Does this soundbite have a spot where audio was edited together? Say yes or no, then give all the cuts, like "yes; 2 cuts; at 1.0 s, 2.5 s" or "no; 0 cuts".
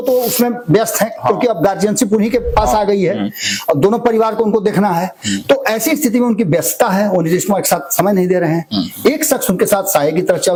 no; 0 cuts